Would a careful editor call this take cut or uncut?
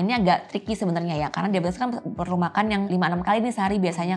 cut